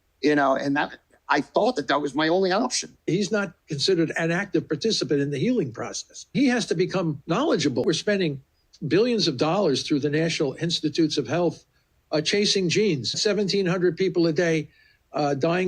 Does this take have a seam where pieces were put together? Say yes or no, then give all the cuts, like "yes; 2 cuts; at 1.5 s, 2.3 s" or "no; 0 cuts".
yes; 4 cuts; at 3.0 s, 6.3 s, 7.8 s, 13.2 s